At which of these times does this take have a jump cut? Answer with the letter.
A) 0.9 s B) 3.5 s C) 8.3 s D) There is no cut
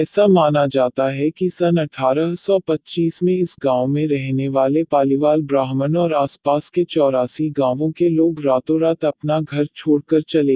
A